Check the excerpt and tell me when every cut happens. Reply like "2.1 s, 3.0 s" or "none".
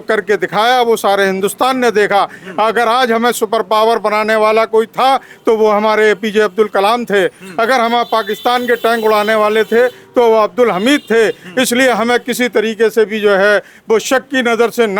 none